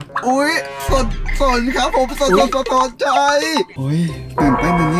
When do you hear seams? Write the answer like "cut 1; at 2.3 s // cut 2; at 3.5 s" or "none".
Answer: cut 1; at 3.7 s

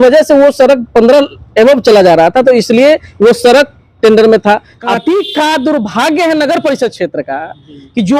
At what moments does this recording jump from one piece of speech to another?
cut 1; at 4.8 s

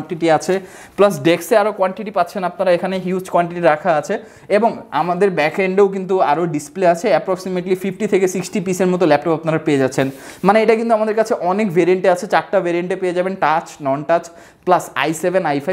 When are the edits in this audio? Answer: none

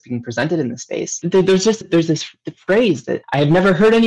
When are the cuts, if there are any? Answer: none

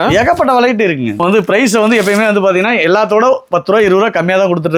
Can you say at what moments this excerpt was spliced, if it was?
cut 1; at 1.2 s

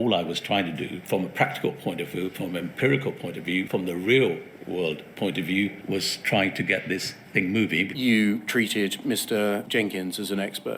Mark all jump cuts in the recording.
cut 1; at 1.0 s // cut 2; at 3.7 s // cut 3; at 5.8 s // cut 4; at 7.9 s // cut 5; at 9.7 s

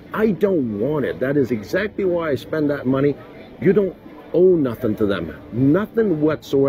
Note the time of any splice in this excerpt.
cut 1; at 3.5 s

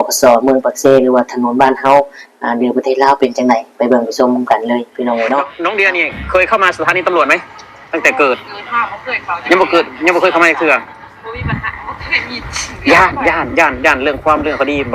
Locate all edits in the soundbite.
cut 1; at 5.5 s

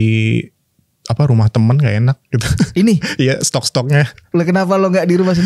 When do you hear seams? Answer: none

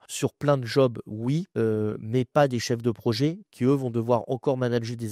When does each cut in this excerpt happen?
none

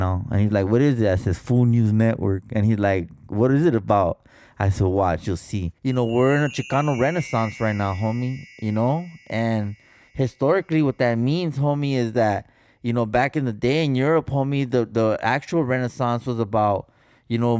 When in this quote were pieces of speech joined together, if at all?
cut 1; at 5.6 s

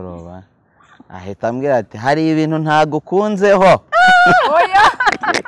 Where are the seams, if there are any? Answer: none

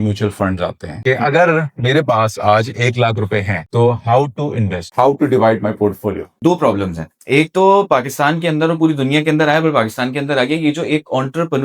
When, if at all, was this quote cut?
cut 1; at 1.0 s // cut 2; at 6.3 s

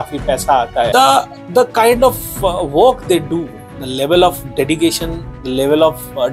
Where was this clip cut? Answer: cut 1; at 0.9 s

